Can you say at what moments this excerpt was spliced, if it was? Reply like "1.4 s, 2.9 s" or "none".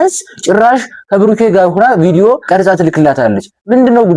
2.4 s